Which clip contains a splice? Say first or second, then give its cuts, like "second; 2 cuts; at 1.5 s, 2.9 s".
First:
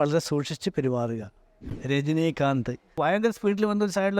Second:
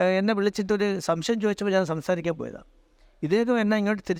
first; 2 cuts; at 1.7 s, 2.9 s